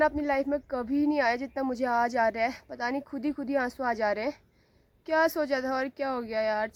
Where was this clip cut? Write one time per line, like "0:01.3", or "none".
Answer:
none